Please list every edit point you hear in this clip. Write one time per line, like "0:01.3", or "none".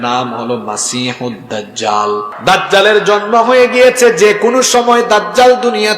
0:02.3